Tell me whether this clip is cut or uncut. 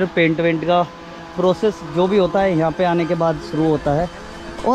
uncut